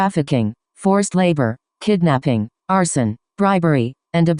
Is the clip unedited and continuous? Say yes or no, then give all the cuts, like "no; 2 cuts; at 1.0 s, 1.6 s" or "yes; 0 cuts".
no; 1 cut; at 1.6 s